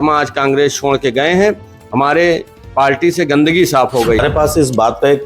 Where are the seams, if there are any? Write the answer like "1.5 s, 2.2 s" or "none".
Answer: 4.2 s